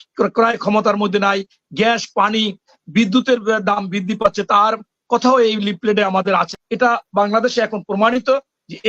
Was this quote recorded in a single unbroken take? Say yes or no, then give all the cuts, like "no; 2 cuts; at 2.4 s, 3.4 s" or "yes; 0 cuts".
no; 1 cut; at 6.5 s